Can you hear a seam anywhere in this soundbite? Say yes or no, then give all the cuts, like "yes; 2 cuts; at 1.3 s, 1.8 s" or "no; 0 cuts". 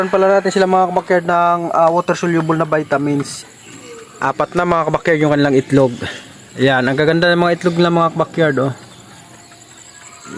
yes; 1 cut; at 3.4 s